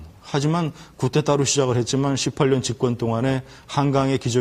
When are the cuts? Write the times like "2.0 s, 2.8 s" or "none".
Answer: 1.2 s